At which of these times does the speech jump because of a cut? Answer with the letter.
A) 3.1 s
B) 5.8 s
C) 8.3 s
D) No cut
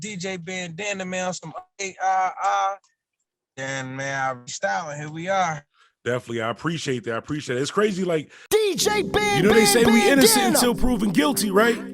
C